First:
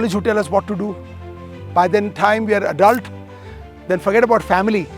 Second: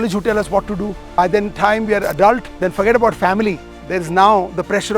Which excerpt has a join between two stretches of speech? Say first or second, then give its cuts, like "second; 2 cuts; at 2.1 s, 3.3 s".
second; 2 cuts; at 1.0 s, 2.5 s